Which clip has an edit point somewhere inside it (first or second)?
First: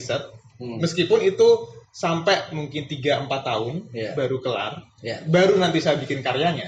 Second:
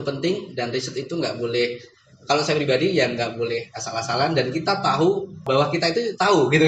second